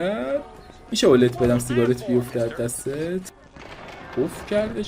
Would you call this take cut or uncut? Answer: cut